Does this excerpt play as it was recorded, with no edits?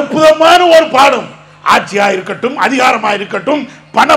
yes; 0 cuts

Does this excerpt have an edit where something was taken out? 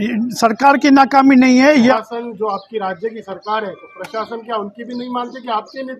yes; 1 cut; at 1.9 s

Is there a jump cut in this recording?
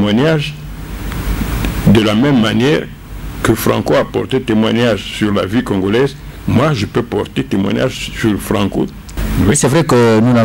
yes; 1 cut; at 9.0 s

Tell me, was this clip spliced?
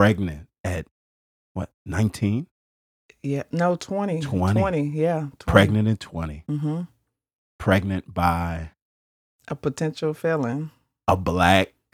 no; 0 cuts

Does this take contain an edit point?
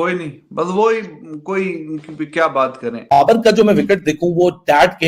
yes; 1 cut; at 3.2 s

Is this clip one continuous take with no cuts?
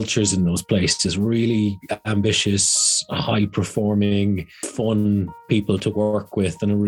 no; 1 cut; at 4.6 s

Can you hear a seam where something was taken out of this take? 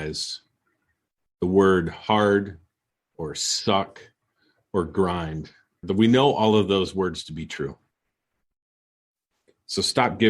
yes; 1 cut; at 5.8 s

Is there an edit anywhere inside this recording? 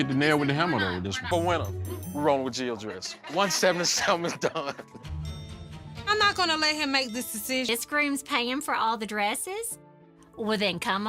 no; 0 cuts

